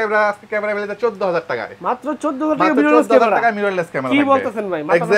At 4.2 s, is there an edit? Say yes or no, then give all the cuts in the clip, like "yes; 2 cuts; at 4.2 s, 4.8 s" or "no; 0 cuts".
no; 0 cuts